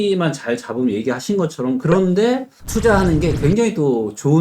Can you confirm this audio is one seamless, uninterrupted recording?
no; 1 cut; at 1.8 s

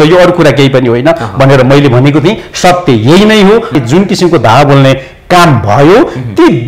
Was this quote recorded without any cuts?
no; 1 cut; at 3.8 s

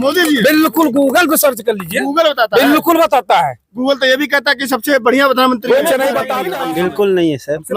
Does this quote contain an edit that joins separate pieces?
yes; 1 cut; at 6.4 s

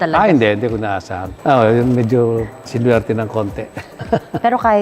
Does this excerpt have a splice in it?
yes; 2 cuts; at 1.2 s, 4.0 s

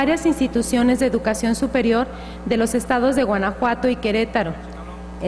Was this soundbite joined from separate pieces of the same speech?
no; 0 cuts

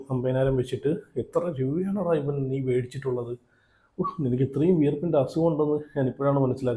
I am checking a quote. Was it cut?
no; 0 cuts

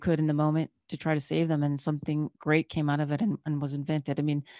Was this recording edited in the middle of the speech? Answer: no; 0 cuts

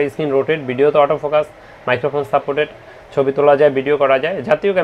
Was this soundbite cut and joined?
no; 0 cuts

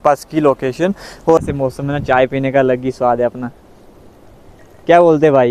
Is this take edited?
yes; 1 cut; at 1.4 s

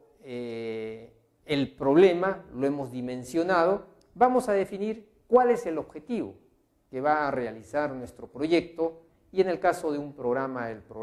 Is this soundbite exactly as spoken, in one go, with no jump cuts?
yes; 0 cuts

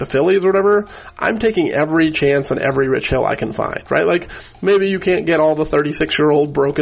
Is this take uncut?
yes; 0 cuts

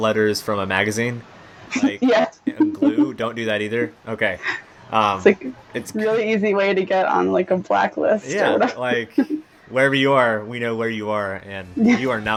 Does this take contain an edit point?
no; 0 cuts

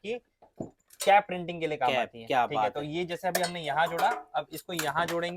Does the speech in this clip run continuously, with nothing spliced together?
yes; 0 cuts

